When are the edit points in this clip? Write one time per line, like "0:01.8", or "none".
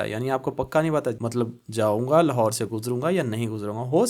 0:01.2